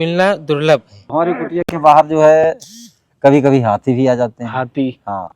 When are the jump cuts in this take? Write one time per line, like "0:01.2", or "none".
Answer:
0:01.0